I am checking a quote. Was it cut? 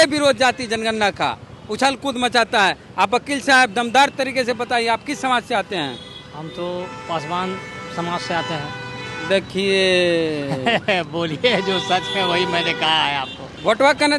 no; 0 cuts

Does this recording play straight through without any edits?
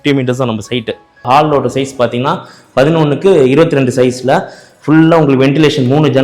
no; 1 cut; at 1.1 s

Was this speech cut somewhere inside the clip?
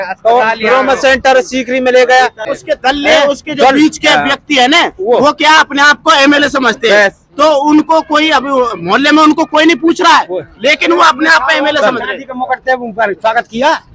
yes; 1 cut; at 2.5 s

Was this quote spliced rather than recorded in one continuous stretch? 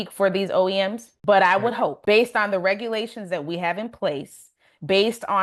yes; 2 cuts; at 1.1 s, 2.0 s

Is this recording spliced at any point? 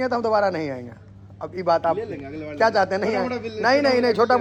no; 0 cuts

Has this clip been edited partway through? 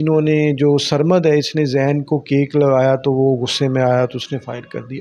no; 0 cuts

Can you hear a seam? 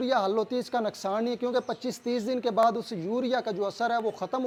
no; 0 cuts

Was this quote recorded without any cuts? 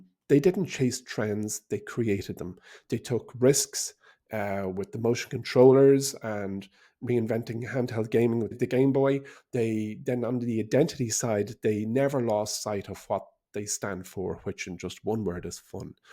no; 1 cut; at 8.5 s

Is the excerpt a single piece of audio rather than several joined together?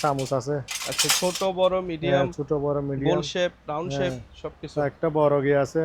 yes; 0 cuts

